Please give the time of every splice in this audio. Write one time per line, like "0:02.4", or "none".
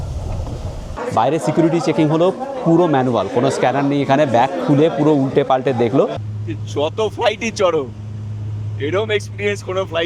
0:01.0
0:06.2